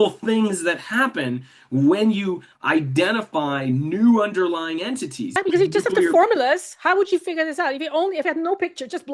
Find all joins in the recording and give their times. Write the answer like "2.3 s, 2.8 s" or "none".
5.3 s